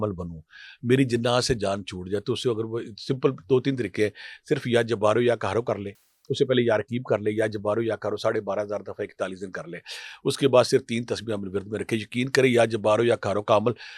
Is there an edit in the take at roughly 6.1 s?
no; 0 cuts

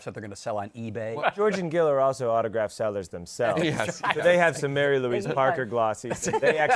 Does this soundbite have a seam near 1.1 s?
yes; 1 cut; at 1.1 s

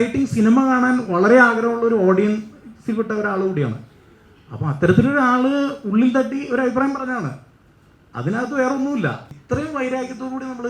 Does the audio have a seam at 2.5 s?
no; 1 cut; at 9.3 s

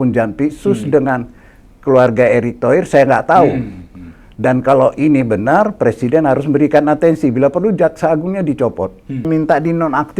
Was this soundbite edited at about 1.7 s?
no; 1 cut; at 9.3 s

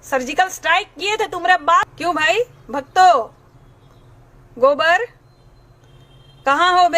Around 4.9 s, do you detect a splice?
no; 1 cut; at 1.9 s

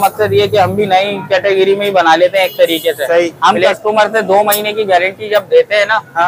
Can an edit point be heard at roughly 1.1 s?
no; 1 cut; at 3.3 s

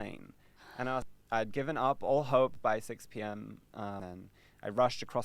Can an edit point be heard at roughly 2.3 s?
no; 2 cuts; at 1.0 s, 4.0 s

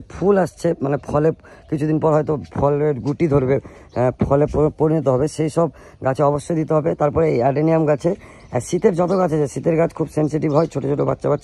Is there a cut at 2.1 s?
no; 0 cuts

